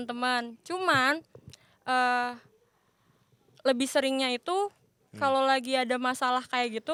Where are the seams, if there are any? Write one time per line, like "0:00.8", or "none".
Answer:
none